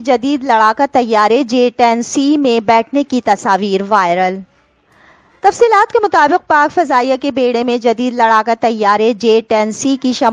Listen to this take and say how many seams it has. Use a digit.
0